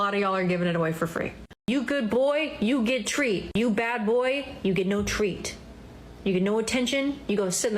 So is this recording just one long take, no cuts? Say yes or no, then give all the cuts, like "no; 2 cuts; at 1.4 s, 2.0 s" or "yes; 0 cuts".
no; 1 cut; at 1.7 s